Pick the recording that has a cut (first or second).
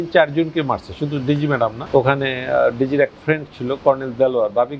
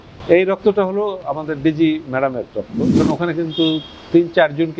second